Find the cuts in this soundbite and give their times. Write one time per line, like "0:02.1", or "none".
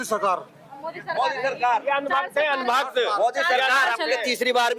none